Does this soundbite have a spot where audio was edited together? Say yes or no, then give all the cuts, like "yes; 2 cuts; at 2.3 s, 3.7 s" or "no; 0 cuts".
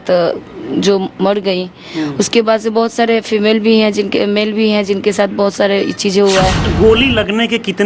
yes; 1 cut; at 6.7 s